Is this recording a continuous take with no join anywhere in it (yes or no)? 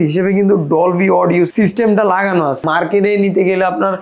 no